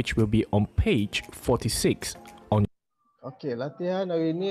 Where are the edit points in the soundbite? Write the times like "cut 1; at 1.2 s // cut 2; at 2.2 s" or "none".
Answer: none